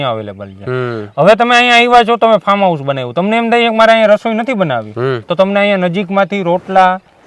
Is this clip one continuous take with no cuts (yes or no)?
yes